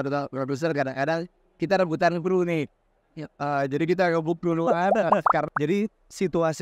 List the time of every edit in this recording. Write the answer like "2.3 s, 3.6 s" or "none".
5.5 s